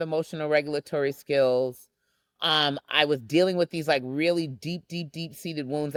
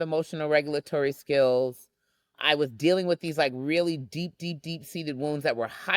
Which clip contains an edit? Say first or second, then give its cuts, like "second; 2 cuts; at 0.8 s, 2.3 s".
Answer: second; 1 cut; at 2.3 s